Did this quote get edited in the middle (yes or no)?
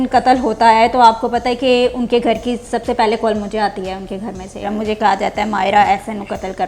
yes